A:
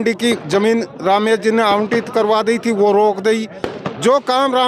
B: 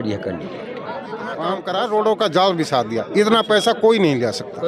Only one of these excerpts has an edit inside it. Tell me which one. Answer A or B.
B